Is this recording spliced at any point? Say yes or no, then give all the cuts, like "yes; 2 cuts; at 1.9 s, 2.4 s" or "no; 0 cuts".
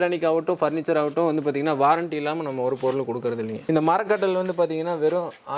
yes; 1 cut; at 3.6 s